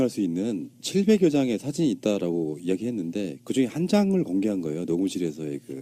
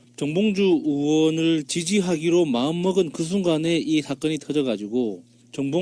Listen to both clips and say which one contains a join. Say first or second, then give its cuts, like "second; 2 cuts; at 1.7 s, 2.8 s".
second; 1 cut; at 1.6 s